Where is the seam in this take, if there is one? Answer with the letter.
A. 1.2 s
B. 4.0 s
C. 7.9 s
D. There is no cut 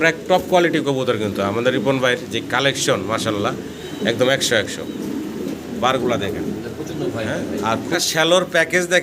C